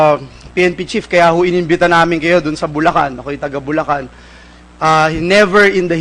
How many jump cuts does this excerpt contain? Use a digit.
1